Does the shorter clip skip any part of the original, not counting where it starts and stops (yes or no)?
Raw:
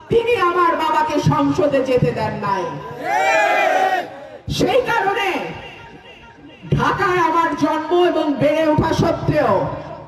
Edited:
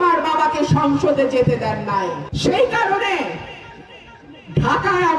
yes